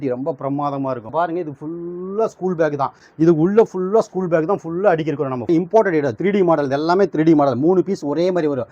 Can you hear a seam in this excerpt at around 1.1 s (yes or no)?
yes